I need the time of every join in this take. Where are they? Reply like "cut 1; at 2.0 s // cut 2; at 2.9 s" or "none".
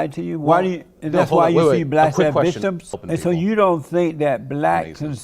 cut 1; at 2.9 s